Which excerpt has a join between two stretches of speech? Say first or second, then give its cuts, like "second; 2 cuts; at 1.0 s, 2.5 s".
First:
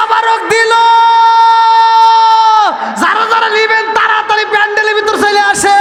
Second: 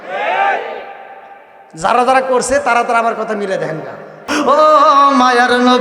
second; 1 cut; at 4.3 s